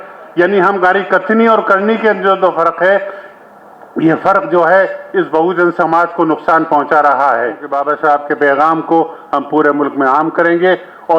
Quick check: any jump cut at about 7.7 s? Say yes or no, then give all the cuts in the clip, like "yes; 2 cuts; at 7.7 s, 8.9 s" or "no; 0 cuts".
yes; 1 cut; at 7.7 s